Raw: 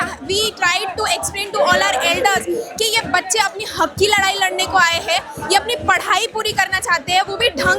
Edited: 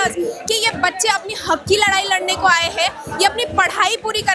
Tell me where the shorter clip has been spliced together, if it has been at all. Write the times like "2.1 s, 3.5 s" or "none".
none

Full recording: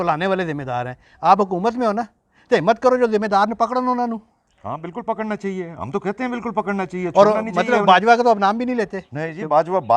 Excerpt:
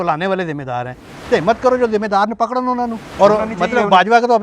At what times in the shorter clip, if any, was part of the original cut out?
1.0 s, 3.1 s

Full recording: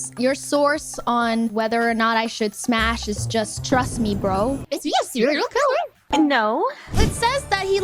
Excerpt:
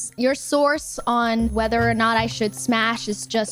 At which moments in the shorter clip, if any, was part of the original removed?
none

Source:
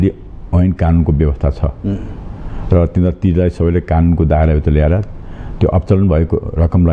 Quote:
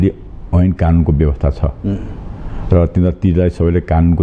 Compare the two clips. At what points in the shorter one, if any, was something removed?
none

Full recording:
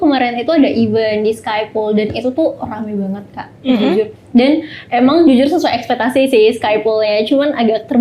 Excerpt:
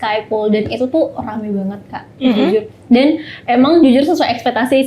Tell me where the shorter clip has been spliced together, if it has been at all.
none

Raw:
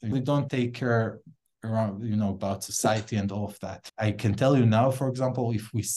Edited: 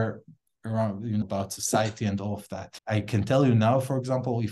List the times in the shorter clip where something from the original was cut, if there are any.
1.2 s

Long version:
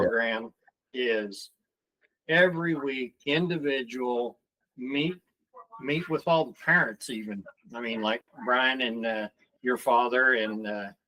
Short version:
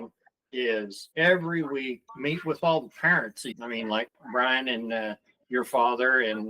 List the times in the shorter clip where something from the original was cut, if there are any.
1.0 s, 2.0 s, 3.5 s

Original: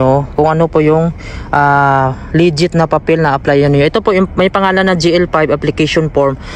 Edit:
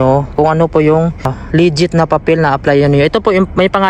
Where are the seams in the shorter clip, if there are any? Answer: 1.4 s

